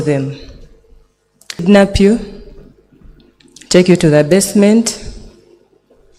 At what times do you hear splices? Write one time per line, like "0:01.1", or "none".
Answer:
0:01.6